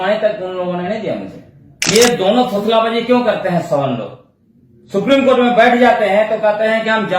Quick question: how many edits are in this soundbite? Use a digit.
1